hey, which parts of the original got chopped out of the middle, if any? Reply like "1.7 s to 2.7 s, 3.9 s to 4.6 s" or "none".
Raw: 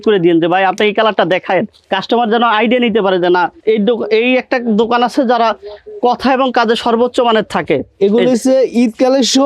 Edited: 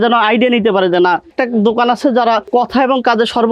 3.6 s to 4.4 s, 5.6 s to 5.9 s